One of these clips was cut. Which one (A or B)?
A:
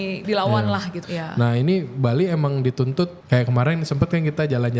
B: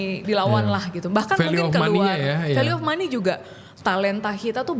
A